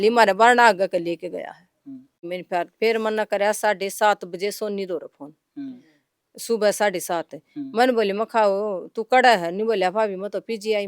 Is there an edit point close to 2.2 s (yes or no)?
yes